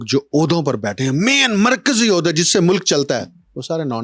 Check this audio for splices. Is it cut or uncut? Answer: uncut